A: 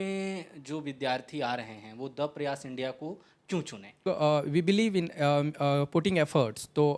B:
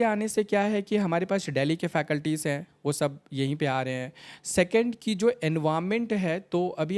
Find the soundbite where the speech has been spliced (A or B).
A